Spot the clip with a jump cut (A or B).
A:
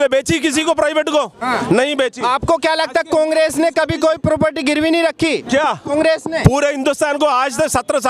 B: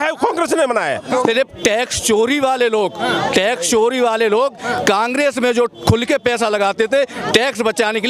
B